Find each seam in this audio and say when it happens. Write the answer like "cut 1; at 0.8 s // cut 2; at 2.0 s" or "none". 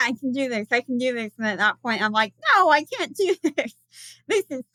none